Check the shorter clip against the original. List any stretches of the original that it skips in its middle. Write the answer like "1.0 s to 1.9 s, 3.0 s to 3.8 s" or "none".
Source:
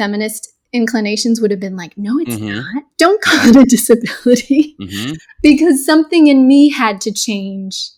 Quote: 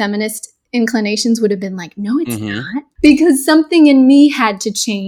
2.8 s to 5.2 s